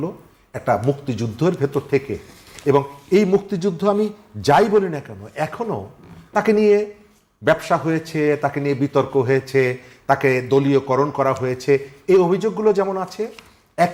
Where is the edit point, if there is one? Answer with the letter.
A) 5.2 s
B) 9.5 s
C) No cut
C